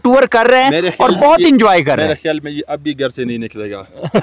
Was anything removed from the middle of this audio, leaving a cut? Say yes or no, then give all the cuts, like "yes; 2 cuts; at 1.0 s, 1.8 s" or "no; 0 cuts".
no; 0 cuts